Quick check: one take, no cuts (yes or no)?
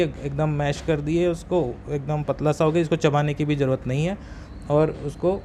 yes